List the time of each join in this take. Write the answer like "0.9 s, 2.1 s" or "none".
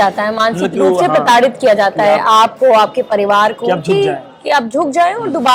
none